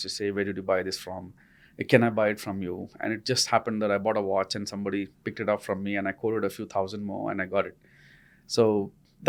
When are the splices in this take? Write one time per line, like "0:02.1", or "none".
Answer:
none